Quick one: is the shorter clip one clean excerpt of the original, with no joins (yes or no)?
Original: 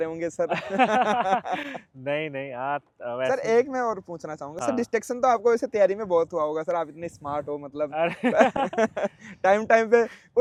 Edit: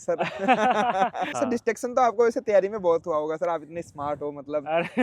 no